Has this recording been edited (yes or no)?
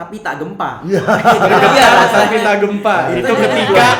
no